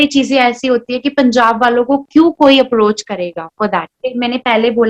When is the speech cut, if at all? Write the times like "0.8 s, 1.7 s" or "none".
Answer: 4.0 s